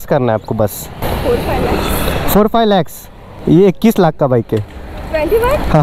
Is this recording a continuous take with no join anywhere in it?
no; 2 cuts; at 1.0 s, 3.3 s

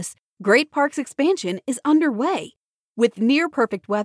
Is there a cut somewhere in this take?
no; 0 cuts

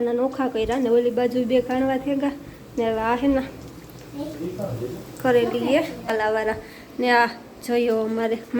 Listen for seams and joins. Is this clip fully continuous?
no; 1 cut; at 6.1 s

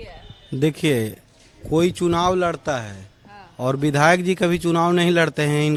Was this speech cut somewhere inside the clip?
no; 0 cuts

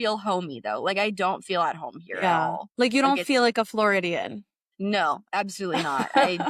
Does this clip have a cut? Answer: no; 0 cuts

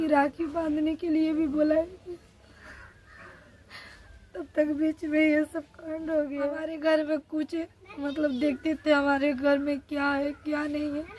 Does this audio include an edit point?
yes; 1 cut; at 6.5 s

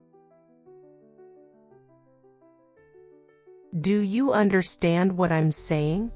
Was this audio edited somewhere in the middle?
no; 0 cuts

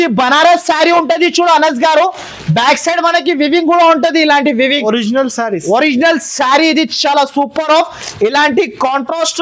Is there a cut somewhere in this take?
no; 0 cuts

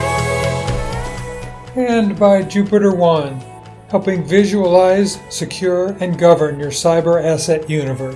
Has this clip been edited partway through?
yes; 1 cut; at 1.5 s

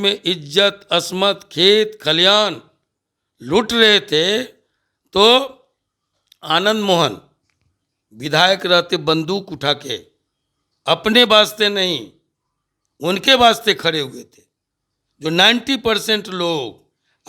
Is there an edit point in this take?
no; 0 cuts

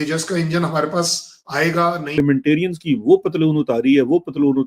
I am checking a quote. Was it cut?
yes; 1 cut; at 2.2 s

